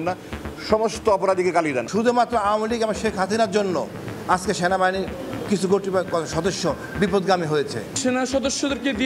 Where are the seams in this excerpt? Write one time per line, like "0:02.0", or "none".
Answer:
0:01.8
0:07.9